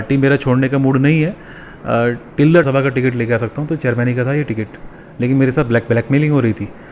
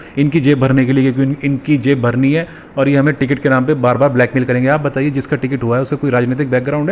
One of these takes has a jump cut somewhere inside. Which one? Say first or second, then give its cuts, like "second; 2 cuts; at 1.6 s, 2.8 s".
first; 1 cut; at 2.6 s